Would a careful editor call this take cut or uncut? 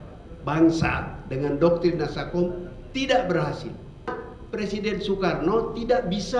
cut